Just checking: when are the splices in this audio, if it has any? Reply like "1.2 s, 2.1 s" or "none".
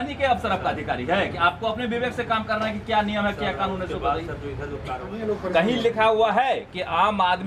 5.0 s